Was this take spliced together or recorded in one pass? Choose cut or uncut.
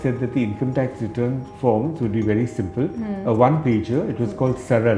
uncut